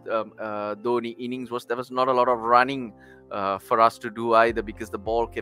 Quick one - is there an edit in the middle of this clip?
no; 0 cuts

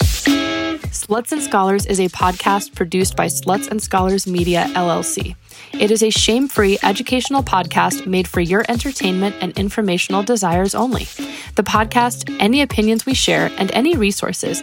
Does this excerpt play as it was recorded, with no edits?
no; 1 cut; at 0.9 s

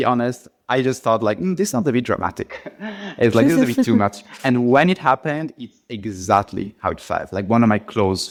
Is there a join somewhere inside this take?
no; 0 cuts

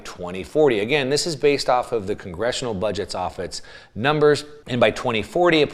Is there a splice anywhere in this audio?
yes; 1 cut; at 4.6 s

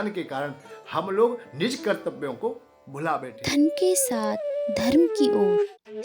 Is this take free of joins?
no; 1 cut; at 3.0 s

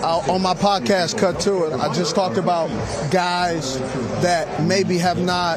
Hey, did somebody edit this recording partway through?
no; 0 cuts

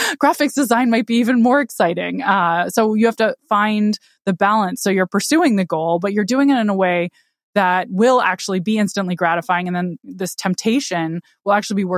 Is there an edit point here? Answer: yes; 1 cut; at 10.0 s

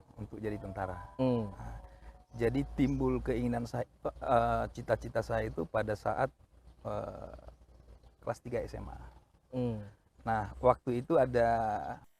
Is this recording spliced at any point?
no; 0 cuts

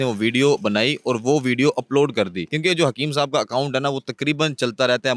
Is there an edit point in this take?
no; 0 cuts

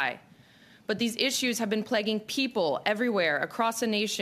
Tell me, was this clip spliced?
no; 0 cuts

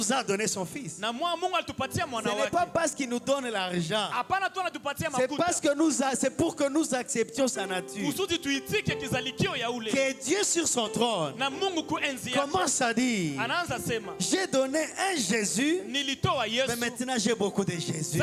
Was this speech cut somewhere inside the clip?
no; 0 cuts

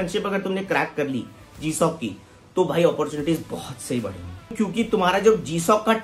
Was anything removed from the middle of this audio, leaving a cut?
yes; 1 cut; at 4.5 s

